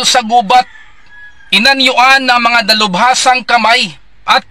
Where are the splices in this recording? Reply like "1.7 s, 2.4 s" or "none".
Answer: none